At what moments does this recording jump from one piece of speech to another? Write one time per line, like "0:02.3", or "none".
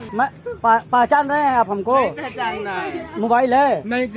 none